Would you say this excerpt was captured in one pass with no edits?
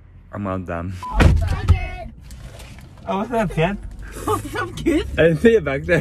no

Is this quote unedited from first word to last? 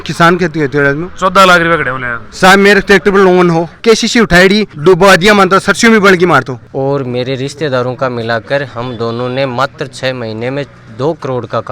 no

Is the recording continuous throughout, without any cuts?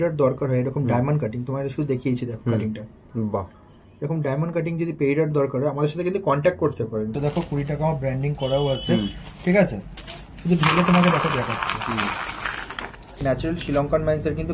no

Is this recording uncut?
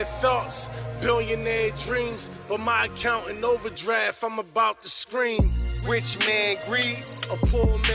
yes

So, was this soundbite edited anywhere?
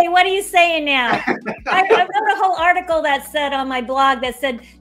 no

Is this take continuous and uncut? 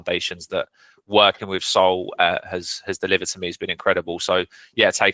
yes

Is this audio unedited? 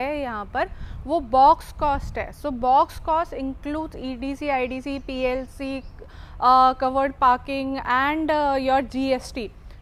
yes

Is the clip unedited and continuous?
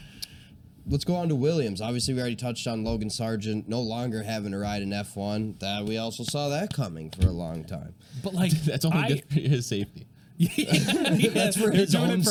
yes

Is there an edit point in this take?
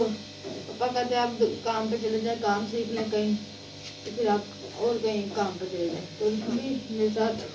yes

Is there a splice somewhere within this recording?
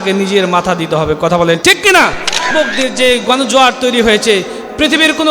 yes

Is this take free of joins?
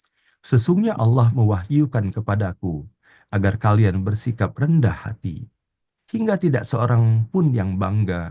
yes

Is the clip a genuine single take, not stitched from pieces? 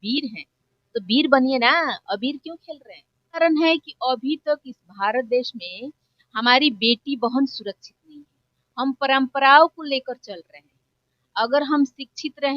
no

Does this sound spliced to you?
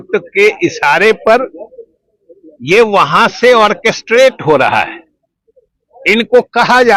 no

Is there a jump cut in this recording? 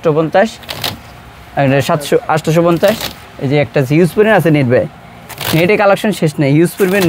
no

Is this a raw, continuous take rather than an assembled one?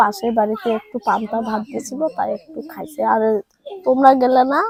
yes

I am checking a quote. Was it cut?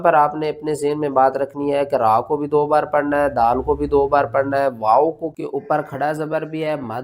yes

